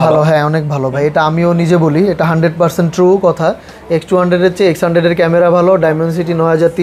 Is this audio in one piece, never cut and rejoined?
yes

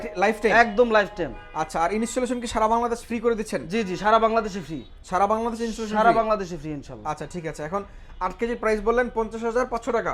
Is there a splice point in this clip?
no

